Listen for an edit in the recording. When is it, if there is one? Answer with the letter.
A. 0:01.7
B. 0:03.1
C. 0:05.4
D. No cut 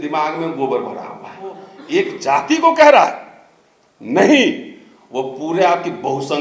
A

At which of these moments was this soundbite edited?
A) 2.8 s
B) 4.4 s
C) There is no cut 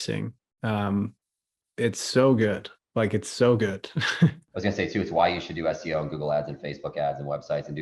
B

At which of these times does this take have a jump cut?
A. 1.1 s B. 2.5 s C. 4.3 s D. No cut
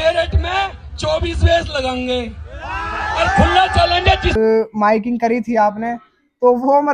C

